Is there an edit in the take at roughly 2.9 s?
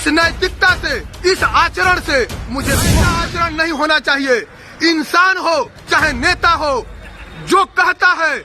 yes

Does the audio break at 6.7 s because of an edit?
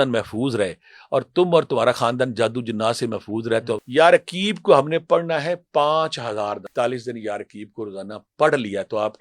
yes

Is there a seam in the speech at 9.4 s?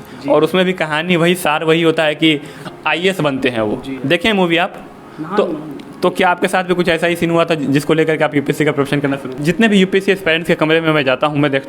yes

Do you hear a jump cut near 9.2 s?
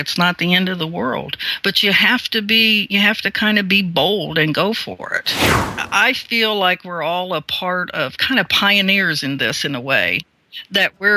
no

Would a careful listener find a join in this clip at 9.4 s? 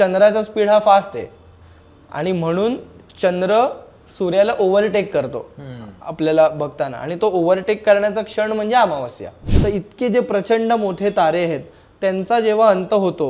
yes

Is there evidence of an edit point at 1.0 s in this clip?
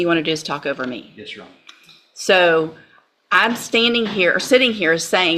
no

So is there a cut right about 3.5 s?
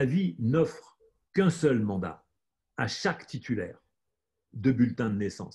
no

